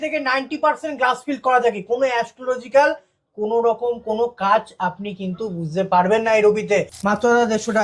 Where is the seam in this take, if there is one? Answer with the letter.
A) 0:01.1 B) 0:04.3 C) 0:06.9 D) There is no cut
C